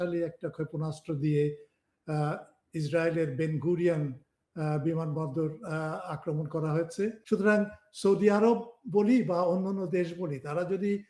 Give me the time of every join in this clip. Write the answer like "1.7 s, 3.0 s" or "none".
7.2 s